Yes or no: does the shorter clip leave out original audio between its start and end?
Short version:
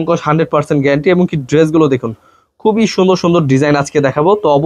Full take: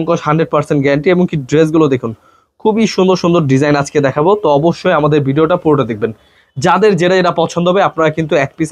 no